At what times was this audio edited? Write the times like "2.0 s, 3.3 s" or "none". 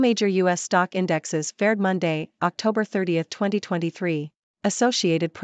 none